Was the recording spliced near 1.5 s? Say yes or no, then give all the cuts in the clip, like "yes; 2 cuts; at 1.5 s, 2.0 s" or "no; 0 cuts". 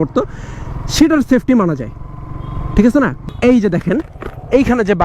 no; 1 cut; at 3.2 s